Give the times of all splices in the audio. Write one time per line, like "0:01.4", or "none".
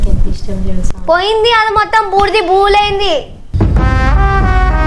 none